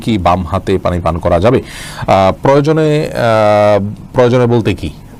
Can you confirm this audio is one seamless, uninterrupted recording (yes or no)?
yes